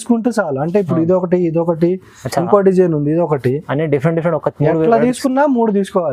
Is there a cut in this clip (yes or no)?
no